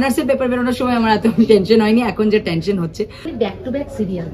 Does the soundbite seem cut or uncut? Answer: cut